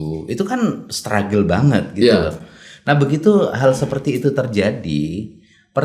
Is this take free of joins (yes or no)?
yes